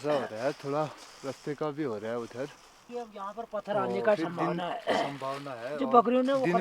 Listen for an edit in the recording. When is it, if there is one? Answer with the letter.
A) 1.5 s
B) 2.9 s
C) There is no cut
B